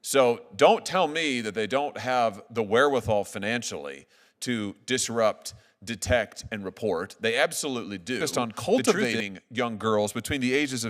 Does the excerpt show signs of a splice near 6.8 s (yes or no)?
no